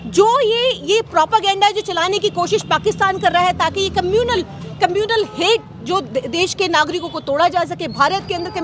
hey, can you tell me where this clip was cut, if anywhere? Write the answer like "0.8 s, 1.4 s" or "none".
none